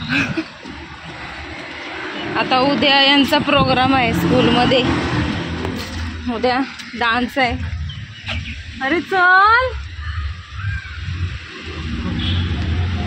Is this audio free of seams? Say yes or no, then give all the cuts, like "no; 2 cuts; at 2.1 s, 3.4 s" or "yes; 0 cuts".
yes; 0 cuts